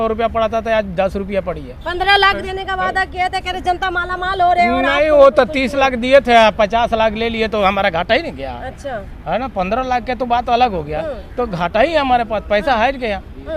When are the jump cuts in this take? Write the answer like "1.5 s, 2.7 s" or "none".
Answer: none